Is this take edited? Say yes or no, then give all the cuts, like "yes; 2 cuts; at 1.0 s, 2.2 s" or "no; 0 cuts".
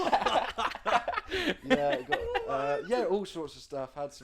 no; 0 cuts